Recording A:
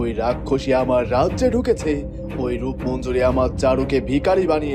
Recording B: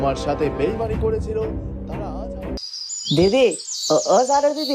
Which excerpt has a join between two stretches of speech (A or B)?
B